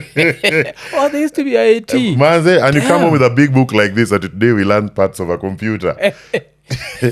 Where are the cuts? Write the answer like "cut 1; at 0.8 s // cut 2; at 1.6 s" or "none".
none

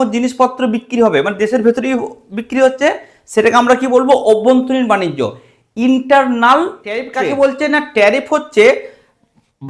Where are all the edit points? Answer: cut 1; at 7.1 s

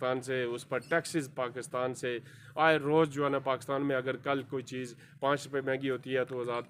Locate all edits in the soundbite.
none

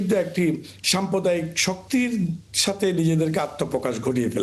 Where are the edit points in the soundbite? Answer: none

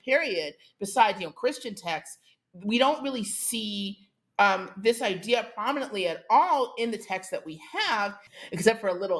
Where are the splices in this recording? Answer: cut 1; at 8.3 s

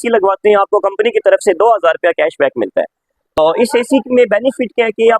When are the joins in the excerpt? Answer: cut 1; at 3.4 s

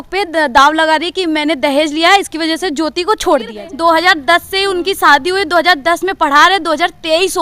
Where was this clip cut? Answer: cut 1; at 3.6 s

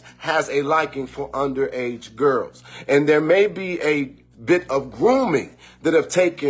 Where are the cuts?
cut 1; at 2.9 s

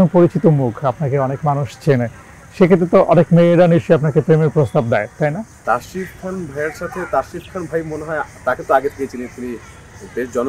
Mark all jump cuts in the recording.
cut 1; at 5.5 s

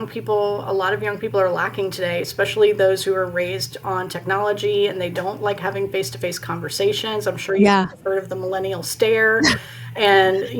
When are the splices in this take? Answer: none

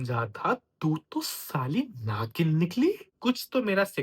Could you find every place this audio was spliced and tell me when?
cut 1; at 3.1 s

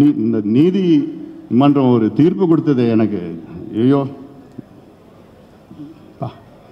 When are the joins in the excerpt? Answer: none

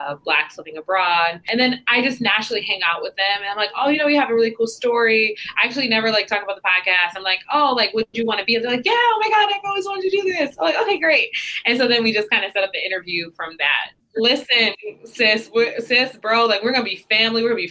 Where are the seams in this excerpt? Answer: cut 1; at 1.4 s // cut 2; at 14.0 s

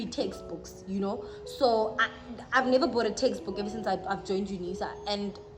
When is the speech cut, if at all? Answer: none

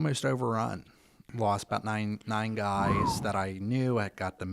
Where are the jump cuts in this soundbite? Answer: cut 1; at 1.3 s

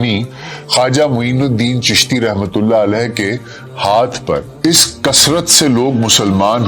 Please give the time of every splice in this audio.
cut 1; at 4.5 s

